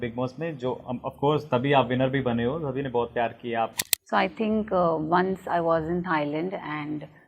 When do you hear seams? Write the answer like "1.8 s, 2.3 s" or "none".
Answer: 3.7 s